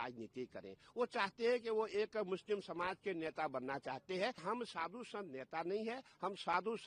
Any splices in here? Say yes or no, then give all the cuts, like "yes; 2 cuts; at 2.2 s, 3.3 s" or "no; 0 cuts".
yes; 1 cut; at 4.4 s